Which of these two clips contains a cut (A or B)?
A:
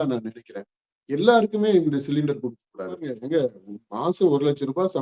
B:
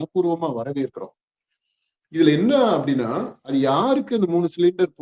A